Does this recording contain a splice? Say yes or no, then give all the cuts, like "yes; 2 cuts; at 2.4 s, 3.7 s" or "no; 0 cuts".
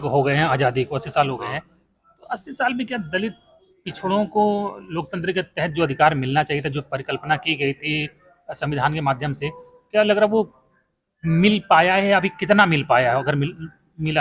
no; 0 cuts